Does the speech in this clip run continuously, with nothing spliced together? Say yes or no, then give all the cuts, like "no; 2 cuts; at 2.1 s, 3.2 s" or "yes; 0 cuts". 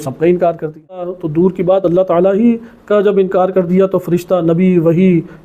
no; 1 cut; at 1.2 s